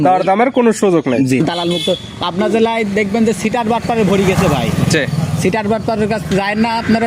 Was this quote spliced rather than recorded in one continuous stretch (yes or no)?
yes